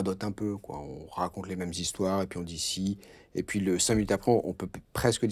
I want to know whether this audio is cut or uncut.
uncut